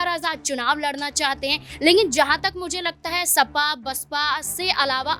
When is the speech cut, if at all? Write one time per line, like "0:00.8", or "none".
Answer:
none